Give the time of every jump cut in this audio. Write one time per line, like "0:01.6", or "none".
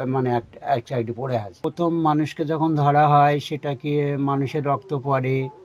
0:01.5